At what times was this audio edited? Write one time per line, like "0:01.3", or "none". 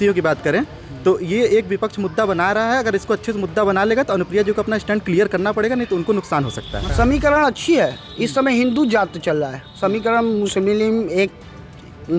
0:06.9